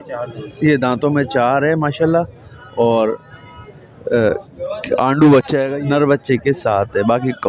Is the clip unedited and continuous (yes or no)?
no